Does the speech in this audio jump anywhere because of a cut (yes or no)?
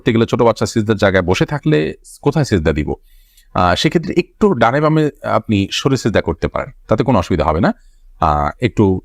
no